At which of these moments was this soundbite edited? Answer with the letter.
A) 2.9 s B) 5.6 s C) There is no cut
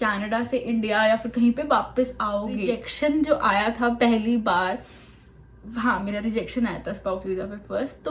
A